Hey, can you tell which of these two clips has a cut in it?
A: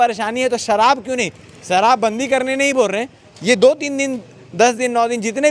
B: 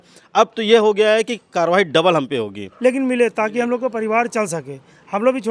B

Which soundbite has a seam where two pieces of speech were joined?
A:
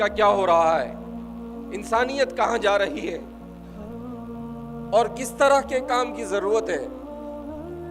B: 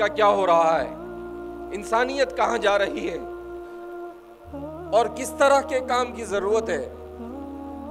A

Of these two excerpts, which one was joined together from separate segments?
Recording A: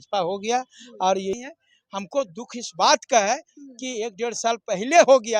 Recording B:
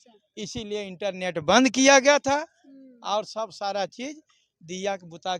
A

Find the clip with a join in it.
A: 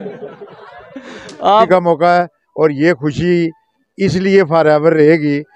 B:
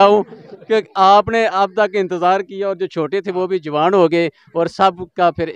A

